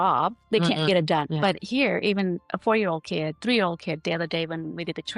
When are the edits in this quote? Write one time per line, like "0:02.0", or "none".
0:01.3